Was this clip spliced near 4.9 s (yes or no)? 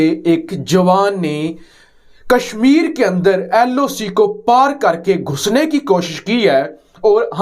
no